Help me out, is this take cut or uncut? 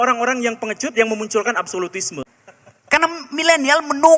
cut